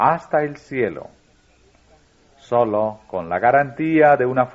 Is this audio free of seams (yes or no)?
no